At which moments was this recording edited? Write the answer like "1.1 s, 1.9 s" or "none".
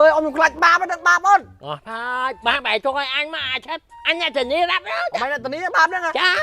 none